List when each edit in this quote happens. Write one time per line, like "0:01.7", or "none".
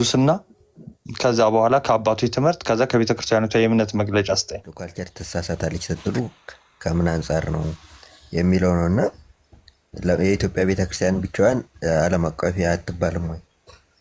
0:04.9